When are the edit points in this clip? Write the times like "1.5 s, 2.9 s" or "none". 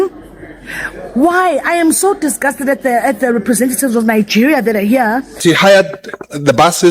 5.4 s